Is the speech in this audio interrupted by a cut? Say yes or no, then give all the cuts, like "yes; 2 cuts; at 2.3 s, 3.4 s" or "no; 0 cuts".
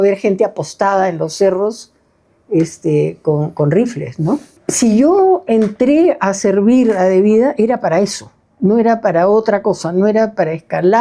yes; 1 cut; at 4.6 s